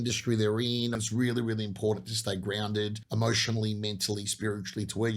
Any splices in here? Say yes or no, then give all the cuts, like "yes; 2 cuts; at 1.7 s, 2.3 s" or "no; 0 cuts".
yes; 2 cuts; at 1.0 s, 3.0 s